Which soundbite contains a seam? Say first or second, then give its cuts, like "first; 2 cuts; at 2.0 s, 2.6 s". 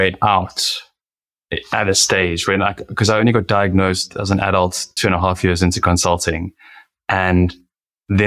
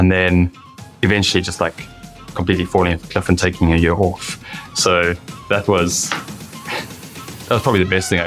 first; 1 cut; at 4.9 s